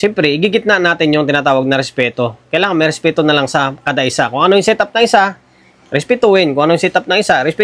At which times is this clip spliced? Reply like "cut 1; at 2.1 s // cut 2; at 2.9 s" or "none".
none